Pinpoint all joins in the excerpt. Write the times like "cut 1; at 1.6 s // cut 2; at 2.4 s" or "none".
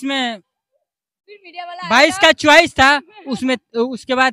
none